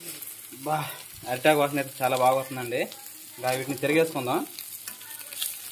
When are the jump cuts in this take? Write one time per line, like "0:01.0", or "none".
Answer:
none